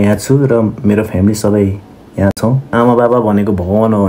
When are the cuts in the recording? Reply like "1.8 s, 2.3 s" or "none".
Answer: 2.7 s

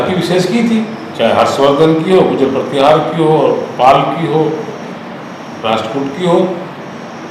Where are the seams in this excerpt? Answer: none

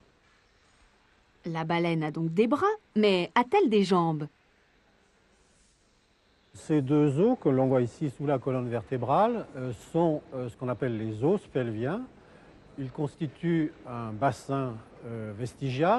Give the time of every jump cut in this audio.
none

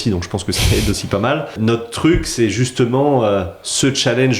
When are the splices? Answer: 1.6 s

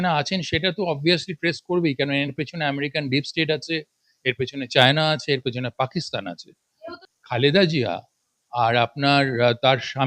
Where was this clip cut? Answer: 7.0 s

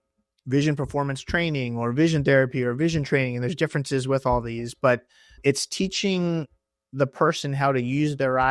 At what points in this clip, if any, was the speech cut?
5.4 s

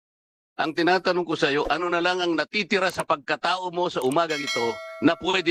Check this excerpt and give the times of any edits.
none

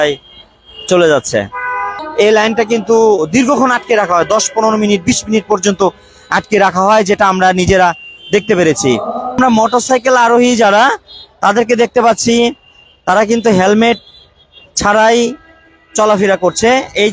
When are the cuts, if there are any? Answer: 2.0 s, 9.4 s

